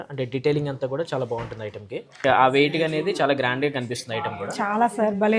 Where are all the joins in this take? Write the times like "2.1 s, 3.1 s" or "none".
2.2 s